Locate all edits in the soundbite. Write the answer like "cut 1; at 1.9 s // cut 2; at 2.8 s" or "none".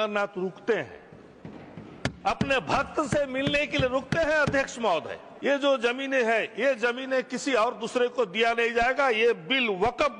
cut 1; at 5.2 s